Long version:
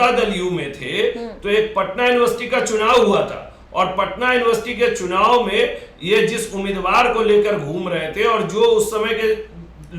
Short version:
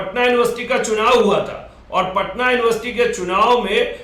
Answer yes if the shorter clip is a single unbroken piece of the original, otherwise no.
yes